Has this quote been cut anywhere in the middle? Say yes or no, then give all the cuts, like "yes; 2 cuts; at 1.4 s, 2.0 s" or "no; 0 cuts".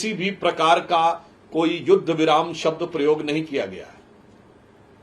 no; 0 cuts